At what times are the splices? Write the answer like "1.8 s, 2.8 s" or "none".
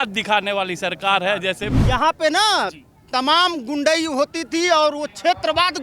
1.7 s